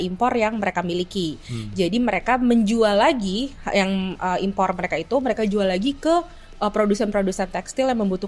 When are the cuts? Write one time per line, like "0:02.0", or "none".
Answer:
none